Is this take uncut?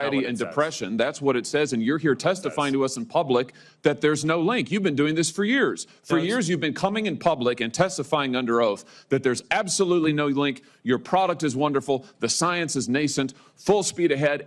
yes; 0 cuts

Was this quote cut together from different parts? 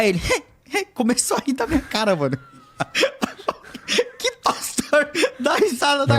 no; 0 cuts

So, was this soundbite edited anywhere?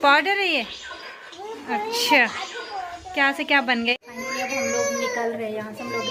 no; 0 cuts

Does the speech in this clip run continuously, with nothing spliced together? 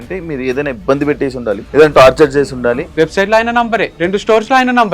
no; 3 cuts; at 1.6 s, 2.8 s, 3.9 s

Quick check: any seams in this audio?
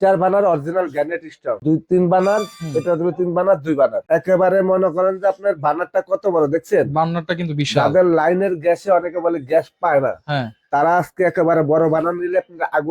yes; 2 cuts; at 1.6 s, 4.0 s

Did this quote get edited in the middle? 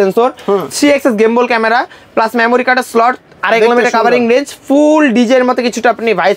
no; 0 cuts

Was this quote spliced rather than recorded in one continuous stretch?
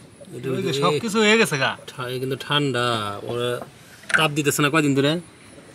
no; 0 cuts

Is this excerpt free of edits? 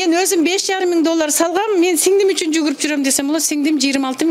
yes; 0 cuts

